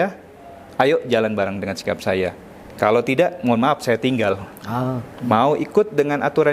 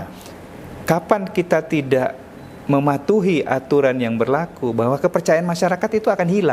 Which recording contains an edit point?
first; 1 cut; at 5.0 s

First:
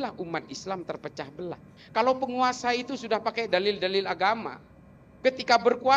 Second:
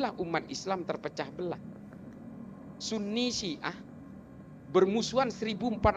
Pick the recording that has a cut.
first; 1 cut; at 1.8 s

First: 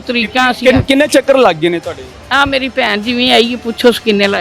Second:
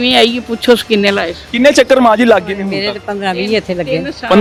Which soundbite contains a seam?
first; 1 cut; at 2.1 s

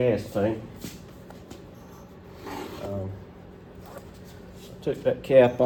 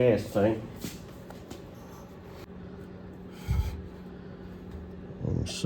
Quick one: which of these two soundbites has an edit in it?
second; 1 cut; at 2.4 s

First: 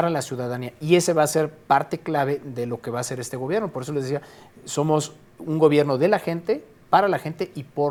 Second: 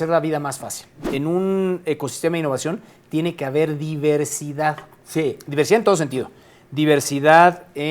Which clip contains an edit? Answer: second; 1 cut; at 1.0 s

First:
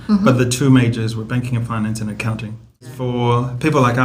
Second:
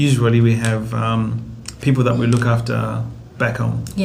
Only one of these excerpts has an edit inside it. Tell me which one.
first; 1 cut; at 2.8 s

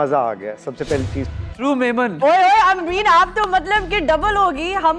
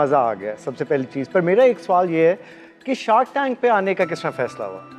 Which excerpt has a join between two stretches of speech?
first; 1 cut; at 1.2 s

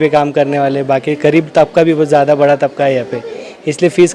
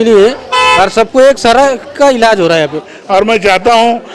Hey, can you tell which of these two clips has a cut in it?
second; 1 cut; at 2.9 s

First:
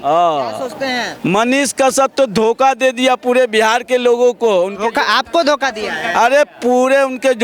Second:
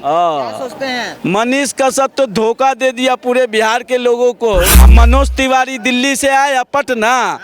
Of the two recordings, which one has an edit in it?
second; 1 cut; at 4.8 s

